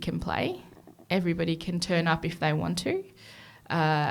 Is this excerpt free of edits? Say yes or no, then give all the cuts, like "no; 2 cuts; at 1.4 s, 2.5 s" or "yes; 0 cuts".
yes; 0 cuts